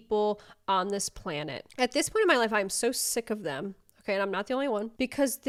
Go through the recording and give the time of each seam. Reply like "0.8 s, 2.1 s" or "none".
none

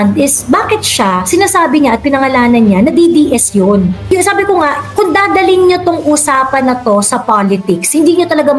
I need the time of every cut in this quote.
4.0 s

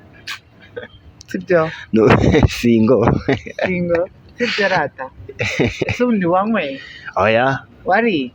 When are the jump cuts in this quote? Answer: none

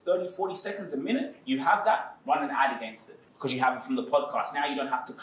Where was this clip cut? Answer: none

